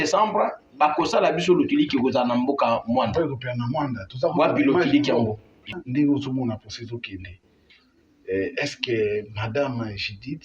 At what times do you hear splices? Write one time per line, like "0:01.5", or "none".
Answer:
0:05.7